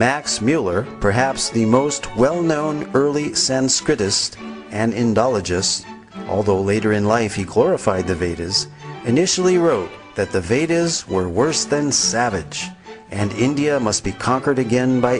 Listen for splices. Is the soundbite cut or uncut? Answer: cut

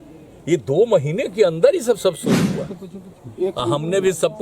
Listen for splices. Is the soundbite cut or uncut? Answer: cut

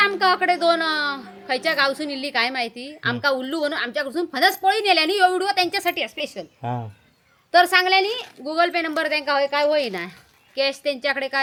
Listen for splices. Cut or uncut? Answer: uncut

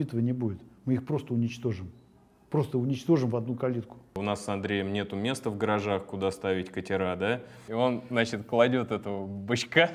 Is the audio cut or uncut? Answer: cut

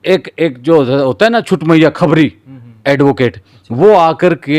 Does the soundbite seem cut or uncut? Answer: uncut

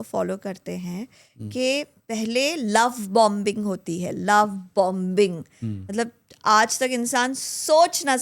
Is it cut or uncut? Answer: uncut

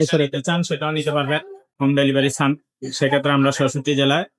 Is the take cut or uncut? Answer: cut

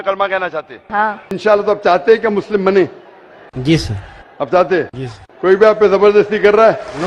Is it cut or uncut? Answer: cut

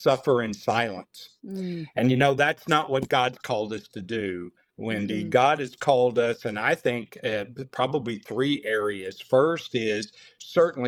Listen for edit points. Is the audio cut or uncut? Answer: uncut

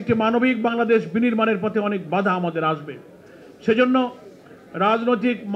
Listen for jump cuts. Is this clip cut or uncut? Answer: uncut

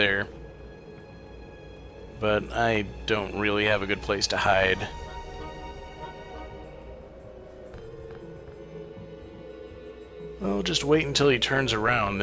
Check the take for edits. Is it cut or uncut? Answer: cut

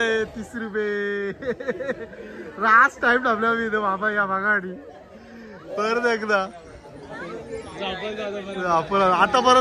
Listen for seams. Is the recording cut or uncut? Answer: uncut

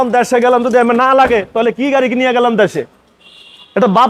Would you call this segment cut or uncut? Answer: uncut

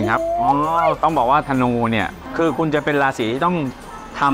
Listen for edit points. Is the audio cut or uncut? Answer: cut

